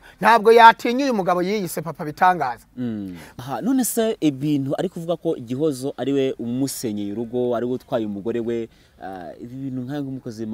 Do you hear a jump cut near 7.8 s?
no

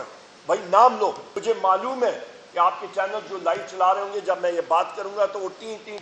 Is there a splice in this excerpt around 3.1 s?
no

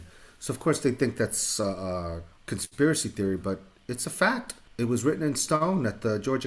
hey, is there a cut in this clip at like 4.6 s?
yes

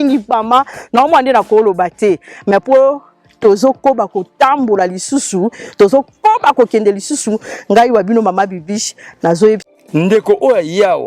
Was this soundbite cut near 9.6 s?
yes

